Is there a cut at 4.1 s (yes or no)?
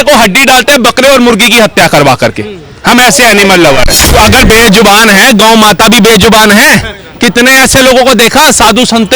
yes